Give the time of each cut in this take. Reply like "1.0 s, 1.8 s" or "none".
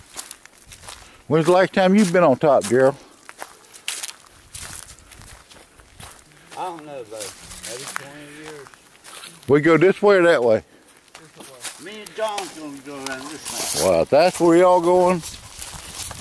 none